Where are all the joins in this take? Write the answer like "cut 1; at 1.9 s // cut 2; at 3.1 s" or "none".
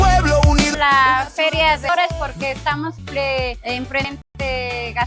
cut 1; at 0.8 s // cut 2; at 1.9 s // cut 3; at 2.9 s // cut 4; at 4.2 s